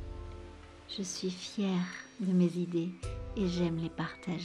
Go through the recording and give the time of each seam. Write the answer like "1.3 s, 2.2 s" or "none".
1.0 s